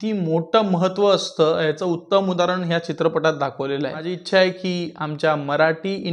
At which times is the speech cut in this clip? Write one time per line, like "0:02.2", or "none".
0:04.1